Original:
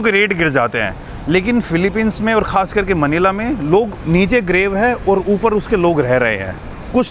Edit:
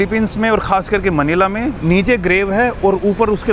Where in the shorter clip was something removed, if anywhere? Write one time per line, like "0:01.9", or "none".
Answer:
0:01.8